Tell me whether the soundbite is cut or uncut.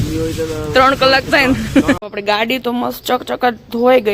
cut